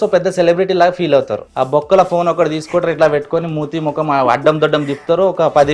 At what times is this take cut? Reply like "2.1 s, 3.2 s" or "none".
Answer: 1.4 s

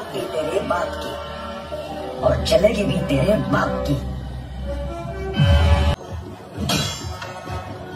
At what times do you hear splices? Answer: 5.9 s

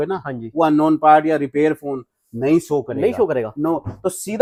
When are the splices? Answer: none

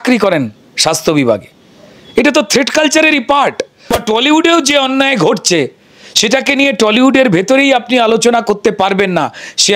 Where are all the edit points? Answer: 4.0 s

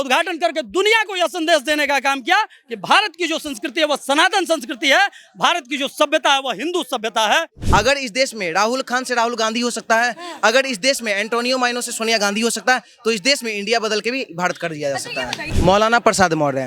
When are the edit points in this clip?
7.6 s, 15.5 s

